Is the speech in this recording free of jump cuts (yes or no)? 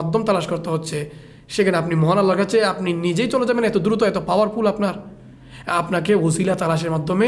yes